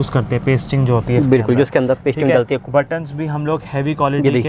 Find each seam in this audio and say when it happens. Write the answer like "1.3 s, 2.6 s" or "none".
none